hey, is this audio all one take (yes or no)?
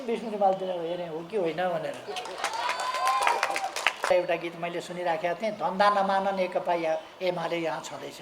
no